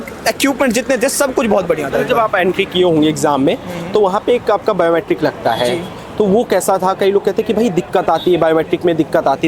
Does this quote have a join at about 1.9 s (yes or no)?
no